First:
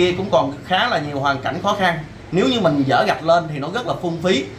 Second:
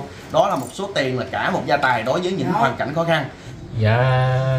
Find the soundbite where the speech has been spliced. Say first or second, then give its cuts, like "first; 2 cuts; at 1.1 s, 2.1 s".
second; 1 cut; at 3.4 s